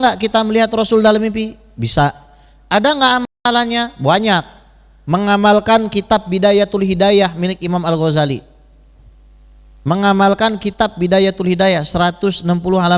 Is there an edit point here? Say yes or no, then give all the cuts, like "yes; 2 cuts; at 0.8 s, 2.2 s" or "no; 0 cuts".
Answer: no; 0 cuts